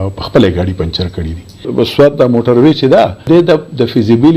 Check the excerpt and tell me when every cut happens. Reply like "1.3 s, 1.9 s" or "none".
1.7 s, 3.3 s